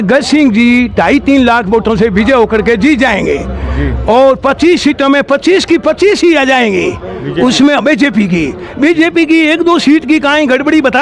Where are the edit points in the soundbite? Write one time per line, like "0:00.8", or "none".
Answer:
none

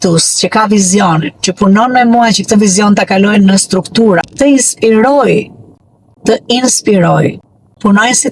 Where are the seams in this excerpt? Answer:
0:04.2

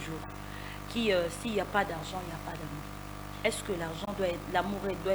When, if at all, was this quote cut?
none

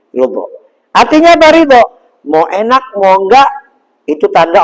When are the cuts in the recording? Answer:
none

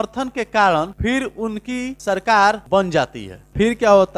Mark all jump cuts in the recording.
0:00.9
0:02.0
0:03.2

